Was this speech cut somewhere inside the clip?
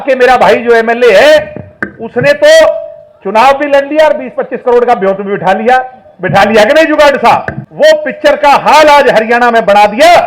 yes; 1 cut; at 7.6 s

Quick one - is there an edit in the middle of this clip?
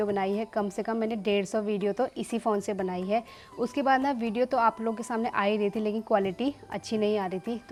no; 0 cuts

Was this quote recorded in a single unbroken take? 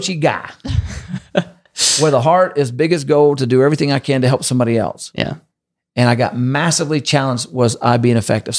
yes; 0 cuts

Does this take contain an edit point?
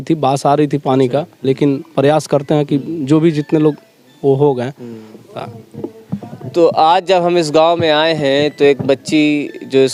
no; 0 cuts

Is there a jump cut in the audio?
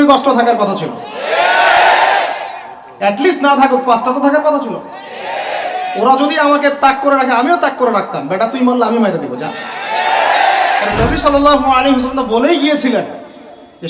yes; 1 cut; at 10.9 s

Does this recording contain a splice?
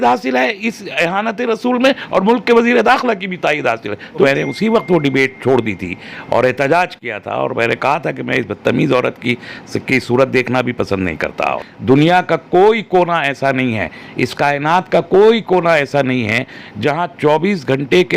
yes; 2 cuts; at 4.2 s, 11.5 s

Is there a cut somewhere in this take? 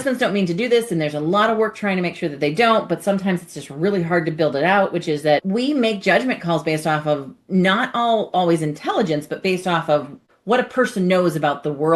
yes; 2 cuts; at 5.4 s, 10.3 s

